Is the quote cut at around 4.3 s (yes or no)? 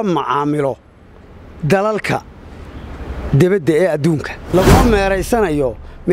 yes